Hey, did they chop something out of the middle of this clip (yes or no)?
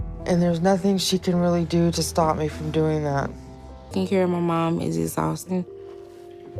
yes